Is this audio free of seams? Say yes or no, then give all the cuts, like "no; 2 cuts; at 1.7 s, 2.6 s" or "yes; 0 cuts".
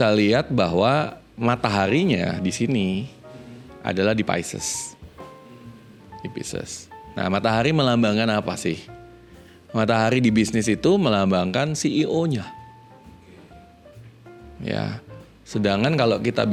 yes; 0 cuts